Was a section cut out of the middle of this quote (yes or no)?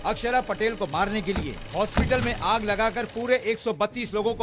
no